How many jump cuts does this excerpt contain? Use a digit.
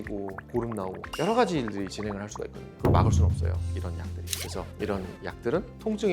1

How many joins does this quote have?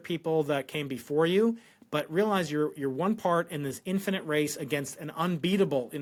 0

